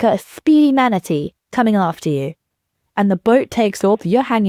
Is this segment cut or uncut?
uncut